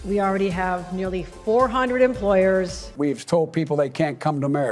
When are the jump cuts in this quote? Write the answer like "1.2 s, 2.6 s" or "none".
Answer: 2.8 s